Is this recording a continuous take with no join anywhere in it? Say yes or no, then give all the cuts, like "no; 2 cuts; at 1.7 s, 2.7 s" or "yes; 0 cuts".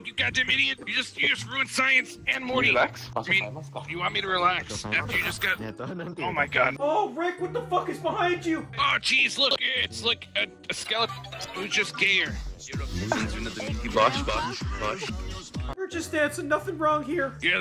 yes; 0 cuts